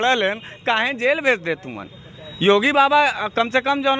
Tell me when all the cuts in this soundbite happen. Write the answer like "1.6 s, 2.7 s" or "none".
none